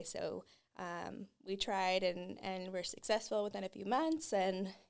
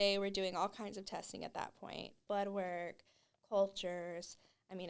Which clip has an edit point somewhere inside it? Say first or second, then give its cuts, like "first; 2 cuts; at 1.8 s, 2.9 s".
second; 1 cut; at 2.2 s